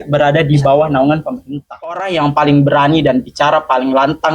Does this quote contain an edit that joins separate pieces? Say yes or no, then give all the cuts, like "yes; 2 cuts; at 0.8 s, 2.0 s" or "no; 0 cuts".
yes; 1 cut; at 1.8 s